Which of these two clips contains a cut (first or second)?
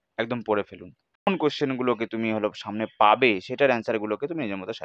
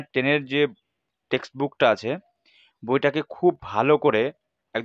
first